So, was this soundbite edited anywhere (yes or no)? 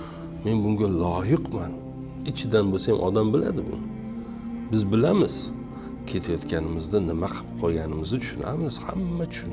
no